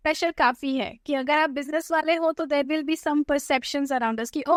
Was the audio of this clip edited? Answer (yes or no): no